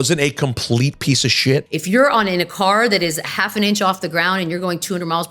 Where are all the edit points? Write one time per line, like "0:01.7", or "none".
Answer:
0:01.7